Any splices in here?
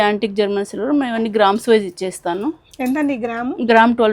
no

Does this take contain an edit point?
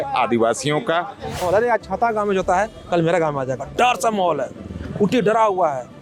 yes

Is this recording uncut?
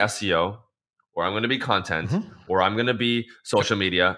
yes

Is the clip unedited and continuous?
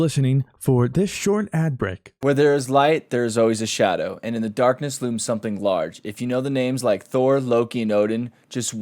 no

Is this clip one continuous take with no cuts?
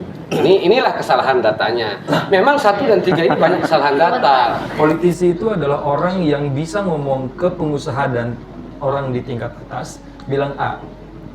no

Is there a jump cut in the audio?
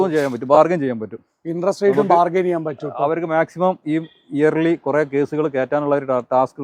no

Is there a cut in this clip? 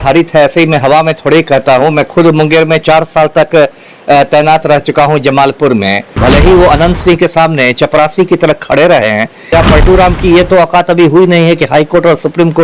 yes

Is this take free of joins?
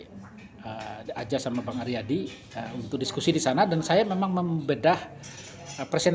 yes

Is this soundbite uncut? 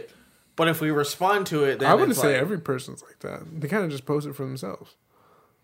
yes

